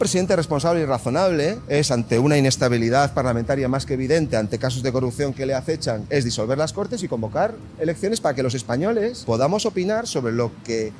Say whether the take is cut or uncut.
cut